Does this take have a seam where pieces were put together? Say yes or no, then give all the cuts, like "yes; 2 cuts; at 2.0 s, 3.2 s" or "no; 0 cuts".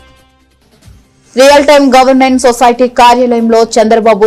no; 0 cuts